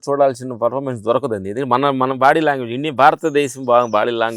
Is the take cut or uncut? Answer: uncut